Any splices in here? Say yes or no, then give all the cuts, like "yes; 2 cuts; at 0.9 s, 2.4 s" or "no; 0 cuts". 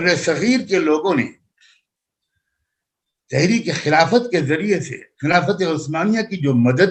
no; 0 cuts